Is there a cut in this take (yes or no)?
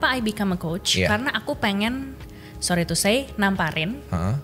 no